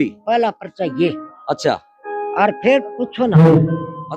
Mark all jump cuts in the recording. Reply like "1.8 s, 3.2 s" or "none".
none